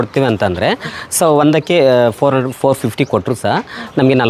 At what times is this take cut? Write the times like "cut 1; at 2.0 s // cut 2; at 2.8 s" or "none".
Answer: none